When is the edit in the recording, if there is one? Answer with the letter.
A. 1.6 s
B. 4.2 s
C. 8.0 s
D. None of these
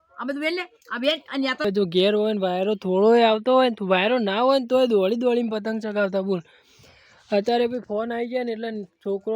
A